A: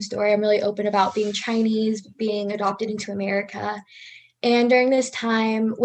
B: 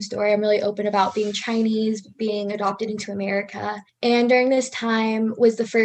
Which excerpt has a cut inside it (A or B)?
B